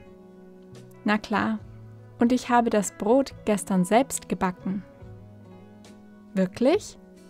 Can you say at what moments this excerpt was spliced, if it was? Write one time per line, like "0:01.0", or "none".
0:01.0
0:04.9
0:06.3